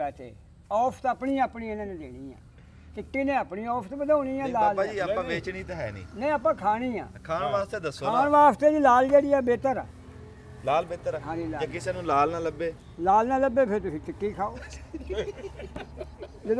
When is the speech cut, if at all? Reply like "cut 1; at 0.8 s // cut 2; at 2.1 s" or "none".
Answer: none